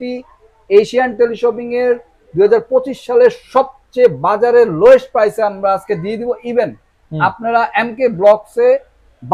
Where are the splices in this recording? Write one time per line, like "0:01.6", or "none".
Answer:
none